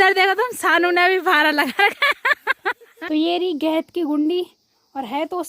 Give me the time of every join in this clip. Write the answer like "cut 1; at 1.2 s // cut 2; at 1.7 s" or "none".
cut 1; at 2.9 s